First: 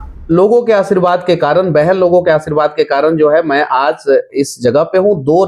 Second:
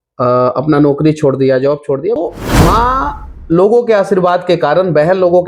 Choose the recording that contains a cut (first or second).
second